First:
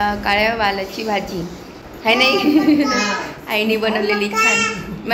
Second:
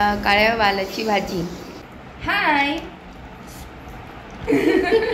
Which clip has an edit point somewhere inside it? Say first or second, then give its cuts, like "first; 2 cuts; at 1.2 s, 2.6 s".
second; 1 cut; at 1.8 s